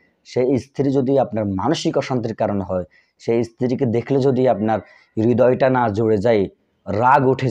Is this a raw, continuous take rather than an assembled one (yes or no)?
yes